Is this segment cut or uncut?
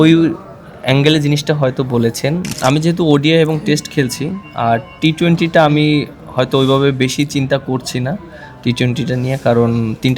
cut